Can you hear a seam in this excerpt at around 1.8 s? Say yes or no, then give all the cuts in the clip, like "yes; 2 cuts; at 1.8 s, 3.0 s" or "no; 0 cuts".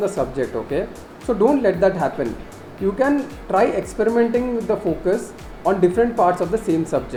no; 0 cuts